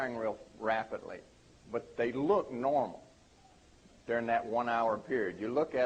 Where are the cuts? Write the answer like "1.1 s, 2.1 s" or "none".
2.1 s